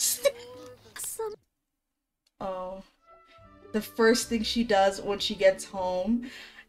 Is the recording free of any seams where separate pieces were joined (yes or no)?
no